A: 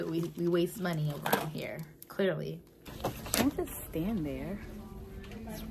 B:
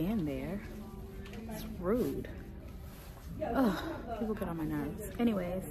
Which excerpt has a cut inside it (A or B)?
A